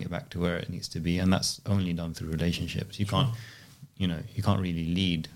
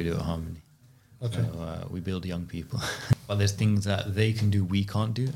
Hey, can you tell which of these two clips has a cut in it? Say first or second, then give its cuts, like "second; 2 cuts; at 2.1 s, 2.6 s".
second; 1 cut; at 3.2 s